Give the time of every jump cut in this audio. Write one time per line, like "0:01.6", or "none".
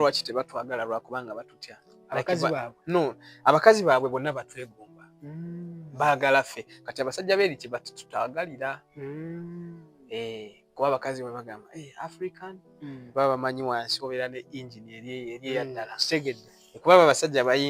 none